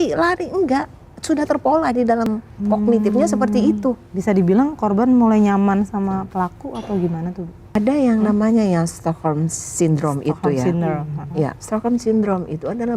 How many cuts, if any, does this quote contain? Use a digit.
2